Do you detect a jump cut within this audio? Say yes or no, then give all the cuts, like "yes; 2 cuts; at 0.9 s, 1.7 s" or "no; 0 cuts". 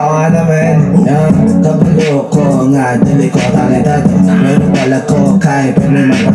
no; 0 cuts